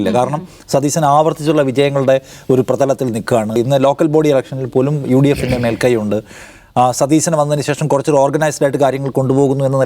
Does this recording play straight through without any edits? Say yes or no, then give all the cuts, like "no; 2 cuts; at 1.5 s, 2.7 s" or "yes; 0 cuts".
no; 1 cut; at 3.6 s